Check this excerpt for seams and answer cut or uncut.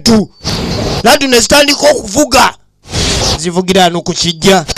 uncut